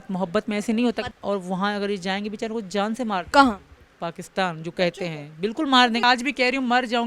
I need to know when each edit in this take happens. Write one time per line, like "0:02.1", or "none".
0:01.1
0:06.0